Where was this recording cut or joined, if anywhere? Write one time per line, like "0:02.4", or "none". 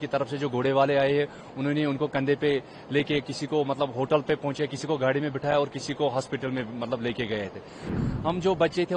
0:07.9